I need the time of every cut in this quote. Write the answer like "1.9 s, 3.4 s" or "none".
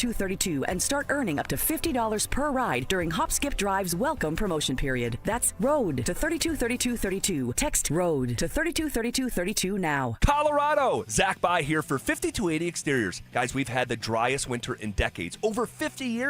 10.2 s